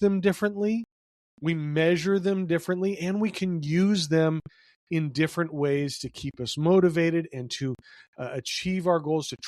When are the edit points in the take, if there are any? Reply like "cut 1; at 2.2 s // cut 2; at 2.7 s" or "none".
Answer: none